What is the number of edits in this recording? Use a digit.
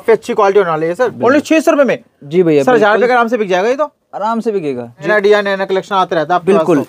2